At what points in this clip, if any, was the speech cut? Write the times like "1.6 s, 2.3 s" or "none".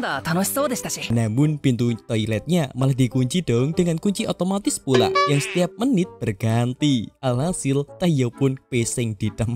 1.0 s

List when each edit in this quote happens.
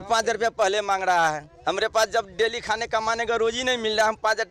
none

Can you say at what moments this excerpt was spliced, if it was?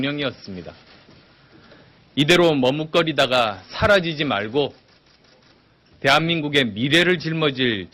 5.0 s

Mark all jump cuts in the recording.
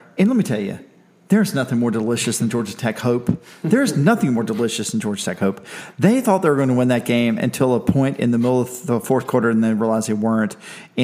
none

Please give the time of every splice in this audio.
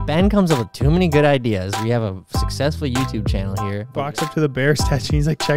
4.1 s

